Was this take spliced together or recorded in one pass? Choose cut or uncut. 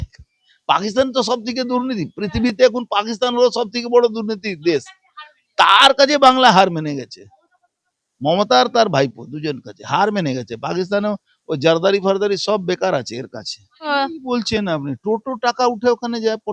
cut